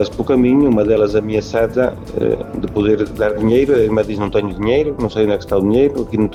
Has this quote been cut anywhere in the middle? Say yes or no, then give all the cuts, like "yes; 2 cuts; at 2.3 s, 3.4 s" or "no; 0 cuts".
no; 0 cuts